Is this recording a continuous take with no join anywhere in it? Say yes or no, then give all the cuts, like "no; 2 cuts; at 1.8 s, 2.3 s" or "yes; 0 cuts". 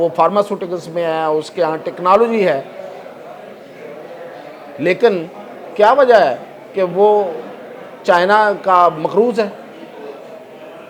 yes; 0 cuts